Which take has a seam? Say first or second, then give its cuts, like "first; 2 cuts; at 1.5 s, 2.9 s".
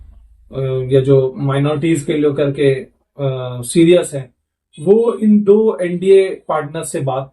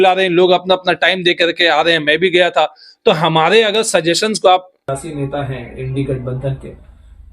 second; 1 cut; at 4.9 s